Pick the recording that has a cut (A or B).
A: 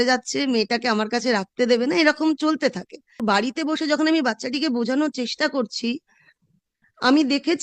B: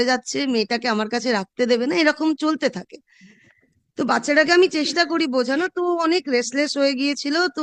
A